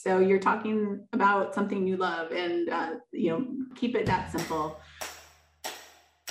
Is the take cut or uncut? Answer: cut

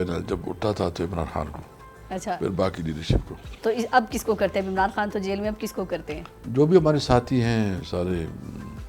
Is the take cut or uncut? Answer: uncut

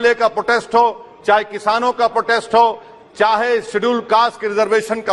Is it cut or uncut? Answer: uncut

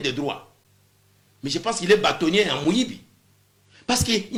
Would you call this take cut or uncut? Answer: uncut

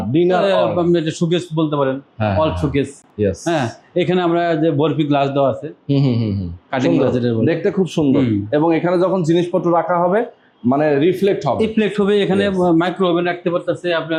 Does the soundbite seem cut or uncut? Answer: uncut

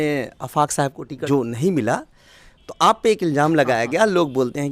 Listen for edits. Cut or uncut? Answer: cut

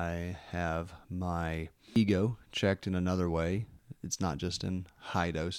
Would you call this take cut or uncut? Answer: cut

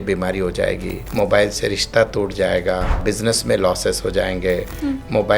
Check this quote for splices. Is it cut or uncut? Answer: cut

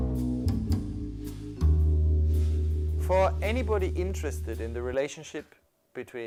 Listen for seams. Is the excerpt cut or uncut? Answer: uncut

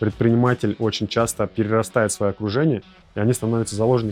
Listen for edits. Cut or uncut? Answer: uncut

